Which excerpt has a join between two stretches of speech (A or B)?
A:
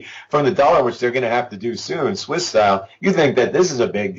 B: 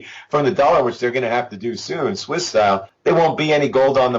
B